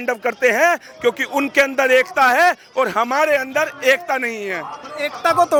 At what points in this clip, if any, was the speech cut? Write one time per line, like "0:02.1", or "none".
none